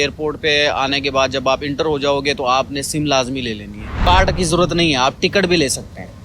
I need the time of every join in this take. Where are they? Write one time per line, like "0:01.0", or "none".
0:04.0